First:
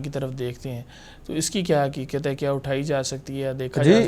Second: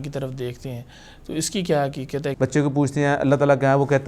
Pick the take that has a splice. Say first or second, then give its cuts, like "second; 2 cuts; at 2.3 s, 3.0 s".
second; 1 cut; at 2.3 s